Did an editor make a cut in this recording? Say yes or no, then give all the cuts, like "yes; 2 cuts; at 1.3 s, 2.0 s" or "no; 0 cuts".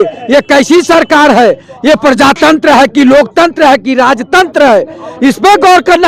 no; 0 cuts